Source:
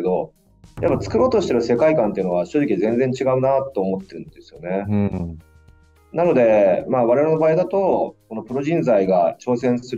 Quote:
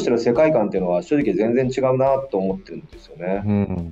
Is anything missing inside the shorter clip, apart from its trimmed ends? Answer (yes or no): no